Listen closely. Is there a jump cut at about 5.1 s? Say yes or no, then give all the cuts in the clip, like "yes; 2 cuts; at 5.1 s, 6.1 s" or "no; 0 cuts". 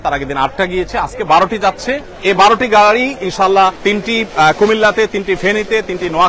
no; 2 cuts; at 2.1 s, 3.8 s